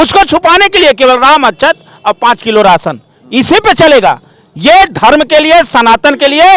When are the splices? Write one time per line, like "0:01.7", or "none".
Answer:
none